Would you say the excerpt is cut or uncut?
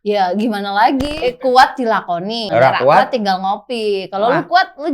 cut